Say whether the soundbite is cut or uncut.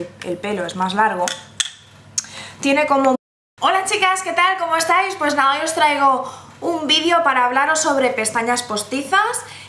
uncut